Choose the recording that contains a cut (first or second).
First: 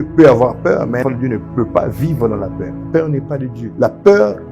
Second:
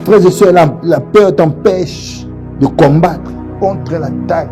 first